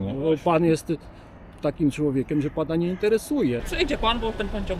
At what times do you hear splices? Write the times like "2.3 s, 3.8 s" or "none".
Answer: 3.6 s

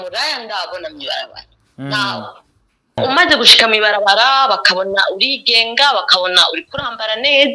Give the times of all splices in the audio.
3.0 s

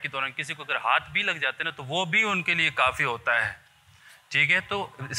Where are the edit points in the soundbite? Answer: none

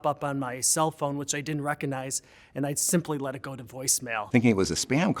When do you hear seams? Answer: 4.2 s

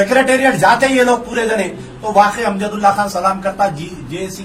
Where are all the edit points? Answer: none

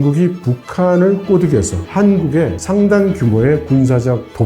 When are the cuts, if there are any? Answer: 1.8 s

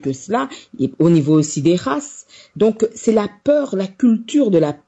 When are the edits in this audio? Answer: none

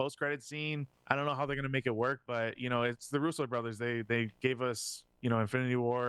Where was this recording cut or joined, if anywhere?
0.9 s

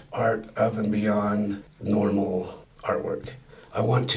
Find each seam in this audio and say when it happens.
1.7 s, 2.6 s

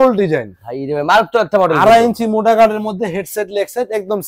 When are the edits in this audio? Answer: none

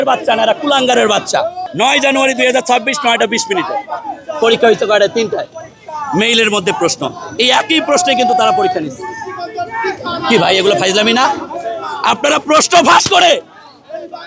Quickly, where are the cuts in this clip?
1.6 s

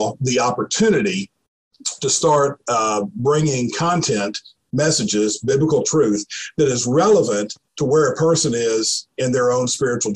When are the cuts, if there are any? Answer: none

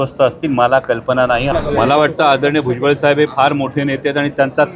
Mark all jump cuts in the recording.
1.5 s

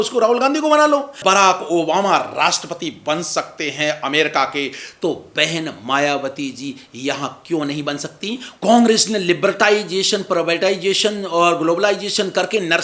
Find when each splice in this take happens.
1.2 s, 8.5 s

